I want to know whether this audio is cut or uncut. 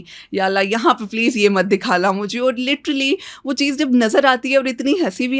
uncut